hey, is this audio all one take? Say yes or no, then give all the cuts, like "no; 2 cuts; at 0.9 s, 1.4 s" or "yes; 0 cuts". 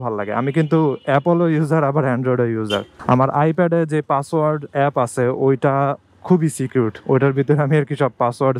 yes; 0 cuts